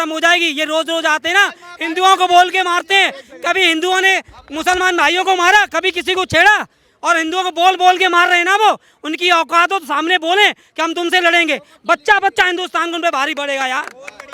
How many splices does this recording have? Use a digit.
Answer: 0